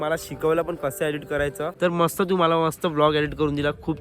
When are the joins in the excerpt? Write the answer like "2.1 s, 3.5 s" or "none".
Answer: 1.7 s